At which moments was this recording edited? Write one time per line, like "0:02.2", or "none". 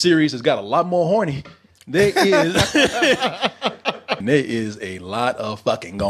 0:04.1